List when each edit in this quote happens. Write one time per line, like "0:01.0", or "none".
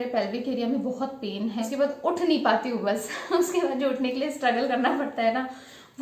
0:01.7